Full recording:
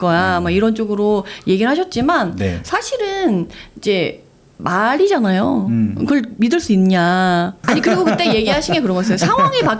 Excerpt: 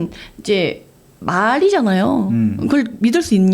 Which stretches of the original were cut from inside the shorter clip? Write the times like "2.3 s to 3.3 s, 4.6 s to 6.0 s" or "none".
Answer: none

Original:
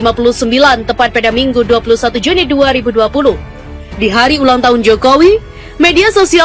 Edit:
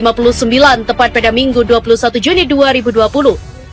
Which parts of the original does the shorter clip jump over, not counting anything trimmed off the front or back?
none

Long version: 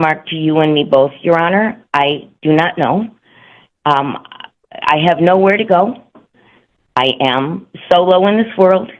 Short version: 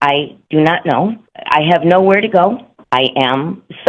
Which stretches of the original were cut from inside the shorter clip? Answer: 3.2 s to 4.7 s, 6.1 s to 6.8 s

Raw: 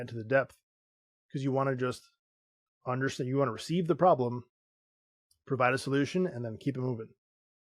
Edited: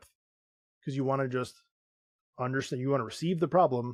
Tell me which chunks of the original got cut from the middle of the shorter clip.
none

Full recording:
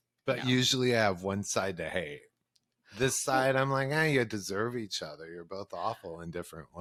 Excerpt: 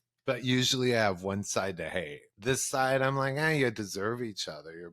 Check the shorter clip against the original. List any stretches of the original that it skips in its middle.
2.2 s to 2.8 s

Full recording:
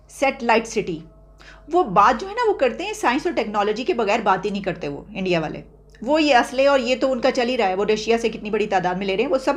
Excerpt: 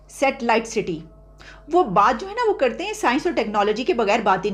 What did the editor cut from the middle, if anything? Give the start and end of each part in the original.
none

